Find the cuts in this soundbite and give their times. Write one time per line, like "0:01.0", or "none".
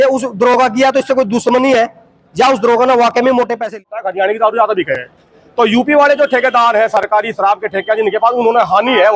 0:03.8